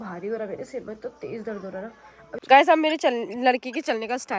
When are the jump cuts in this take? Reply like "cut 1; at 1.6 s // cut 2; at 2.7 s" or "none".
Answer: cut 1; at 2.4 s

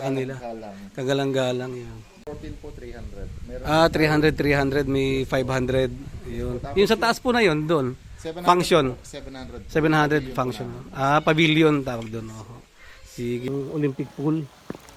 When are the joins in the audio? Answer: cut 1; at 2.3 s // cut 2; at 13.5 s

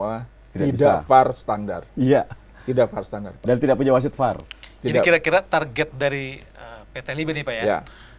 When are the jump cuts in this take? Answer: none

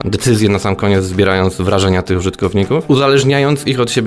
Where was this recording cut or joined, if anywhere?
cut 1; at 2.8 s

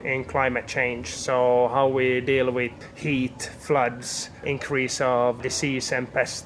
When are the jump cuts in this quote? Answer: cut 1; at 2.8 s // cut 2; at 4.4 s // cut 3; at 5.4 s

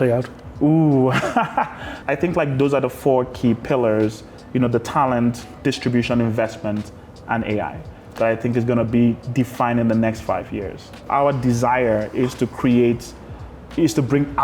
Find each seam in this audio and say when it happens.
cut 1; at 1.9 s // cut 2; at 11.0 s

